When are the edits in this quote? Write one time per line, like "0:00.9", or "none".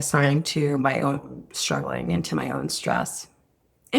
none